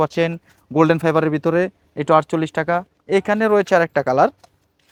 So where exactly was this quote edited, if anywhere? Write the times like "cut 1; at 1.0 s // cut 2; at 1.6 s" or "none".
none